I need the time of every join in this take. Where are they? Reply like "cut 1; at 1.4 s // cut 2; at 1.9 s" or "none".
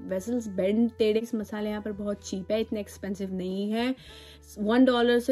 cut 1; at 1.1 s